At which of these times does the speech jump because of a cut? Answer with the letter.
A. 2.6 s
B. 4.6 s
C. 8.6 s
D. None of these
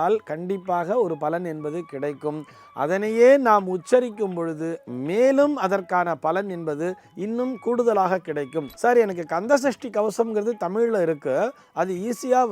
C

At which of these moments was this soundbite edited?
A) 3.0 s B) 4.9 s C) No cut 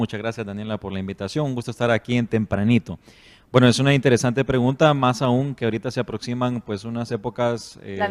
A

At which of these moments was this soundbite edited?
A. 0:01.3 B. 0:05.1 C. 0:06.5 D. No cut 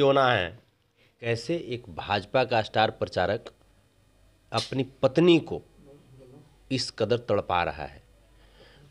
A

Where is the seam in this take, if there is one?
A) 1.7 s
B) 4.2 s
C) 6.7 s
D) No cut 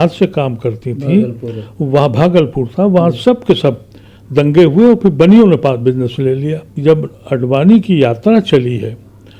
C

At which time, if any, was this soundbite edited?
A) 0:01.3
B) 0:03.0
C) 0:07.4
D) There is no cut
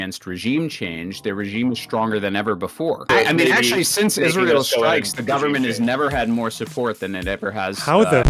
B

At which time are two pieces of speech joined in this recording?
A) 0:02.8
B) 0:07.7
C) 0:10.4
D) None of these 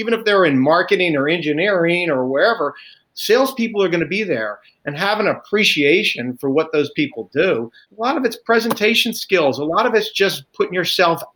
B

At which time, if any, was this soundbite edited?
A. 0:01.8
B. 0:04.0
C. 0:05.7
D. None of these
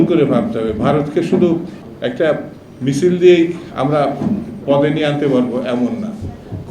A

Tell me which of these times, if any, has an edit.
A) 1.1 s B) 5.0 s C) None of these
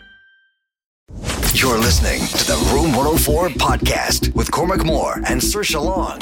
A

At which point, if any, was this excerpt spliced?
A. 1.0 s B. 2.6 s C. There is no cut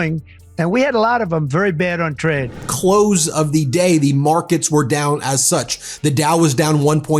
B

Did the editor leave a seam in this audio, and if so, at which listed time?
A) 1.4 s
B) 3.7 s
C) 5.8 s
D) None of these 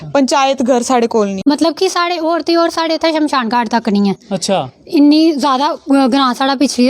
A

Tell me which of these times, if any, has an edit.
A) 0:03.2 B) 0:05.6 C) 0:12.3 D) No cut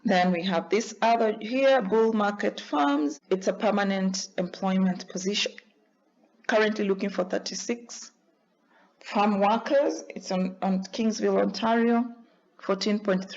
A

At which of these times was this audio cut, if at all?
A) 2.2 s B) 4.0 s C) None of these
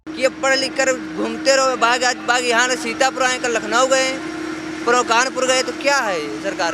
C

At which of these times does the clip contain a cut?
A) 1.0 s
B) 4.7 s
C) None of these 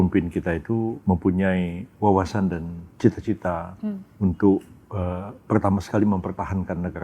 A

